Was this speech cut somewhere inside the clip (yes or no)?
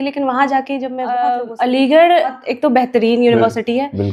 yes